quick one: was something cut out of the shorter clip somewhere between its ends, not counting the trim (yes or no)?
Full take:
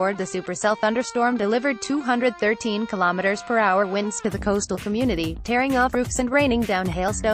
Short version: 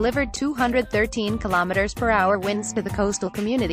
no